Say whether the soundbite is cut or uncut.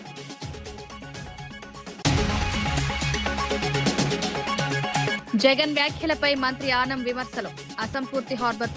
cut